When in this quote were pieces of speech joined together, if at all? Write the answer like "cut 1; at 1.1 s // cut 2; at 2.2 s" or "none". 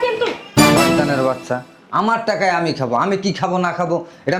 none